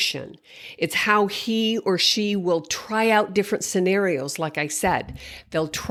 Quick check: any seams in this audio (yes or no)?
no